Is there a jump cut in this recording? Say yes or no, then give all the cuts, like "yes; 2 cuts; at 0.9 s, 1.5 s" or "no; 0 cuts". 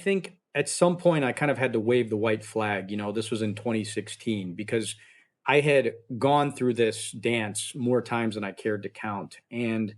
no; 0 cuts